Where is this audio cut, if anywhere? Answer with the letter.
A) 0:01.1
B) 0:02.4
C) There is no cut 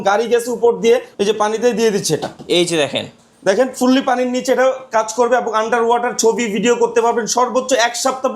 A